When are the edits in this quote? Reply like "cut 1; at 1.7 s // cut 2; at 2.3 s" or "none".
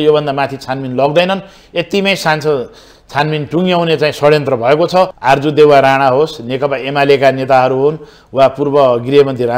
cut 1; at 5.2 s